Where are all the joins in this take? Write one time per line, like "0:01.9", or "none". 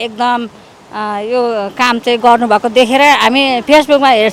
none